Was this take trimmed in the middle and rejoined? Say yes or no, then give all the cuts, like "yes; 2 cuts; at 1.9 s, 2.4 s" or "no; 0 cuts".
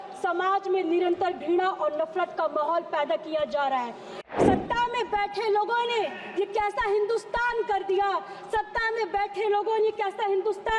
yes; 1 cut; at 4.1 s